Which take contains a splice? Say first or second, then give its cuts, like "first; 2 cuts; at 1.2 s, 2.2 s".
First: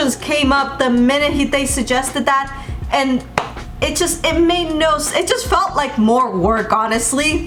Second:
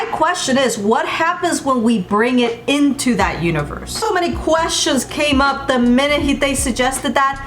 second; 1 cut; at 3.9 s